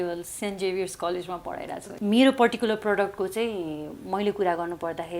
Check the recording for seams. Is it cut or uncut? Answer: cut